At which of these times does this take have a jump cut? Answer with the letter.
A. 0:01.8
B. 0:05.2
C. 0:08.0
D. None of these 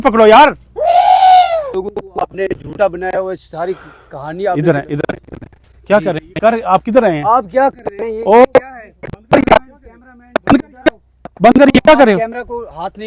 A